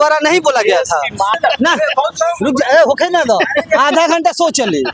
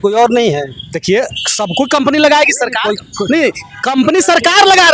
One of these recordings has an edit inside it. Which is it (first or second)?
first